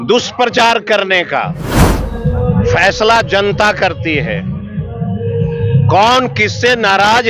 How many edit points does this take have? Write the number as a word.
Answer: one